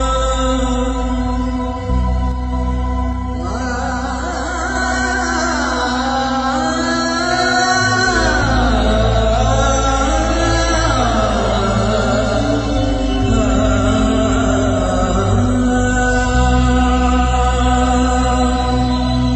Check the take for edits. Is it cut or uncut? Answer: uncut